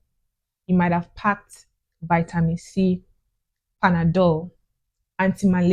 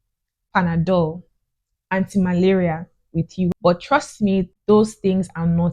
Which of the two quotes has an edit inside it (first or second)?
second